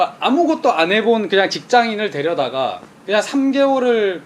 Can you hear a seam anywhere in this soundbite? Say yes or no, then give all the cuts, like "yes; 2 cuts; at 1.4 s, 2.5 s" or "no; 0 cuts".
no; 0 cuts